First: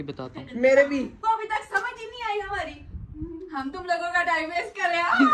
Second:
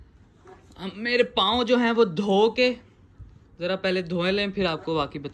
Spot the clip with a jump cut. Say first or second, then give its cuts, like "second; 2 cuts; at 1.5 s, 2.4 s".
first; 1 cut; at 1.1 s